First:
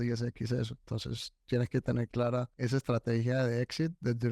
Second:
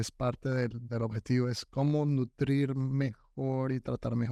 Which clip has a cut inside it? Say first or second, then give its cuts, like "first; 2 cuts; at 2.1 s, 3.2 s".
first; 1 cut; at 2.5 s